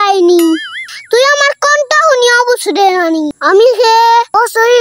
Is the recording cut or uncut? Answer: cut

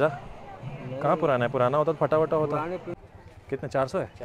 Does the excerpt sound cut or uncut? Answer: cut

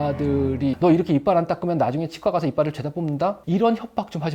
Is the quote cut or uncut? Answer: cut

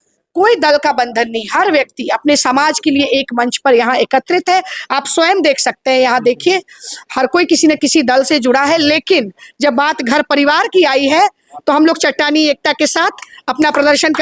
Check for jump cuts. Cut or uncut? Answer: uncut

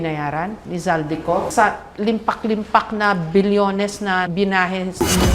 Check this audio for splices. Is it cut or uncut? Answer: cut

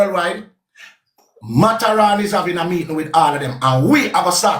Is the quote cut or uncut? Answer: uncut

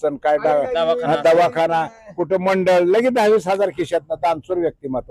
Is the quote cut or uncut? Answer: uncut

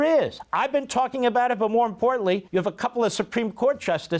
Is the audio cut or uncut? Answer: cut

